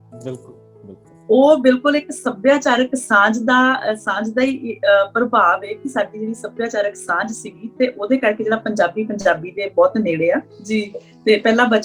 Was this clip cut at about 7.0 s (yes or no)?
no